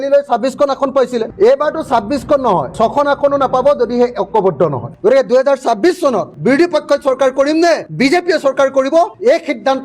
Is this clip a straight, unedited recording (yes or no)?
no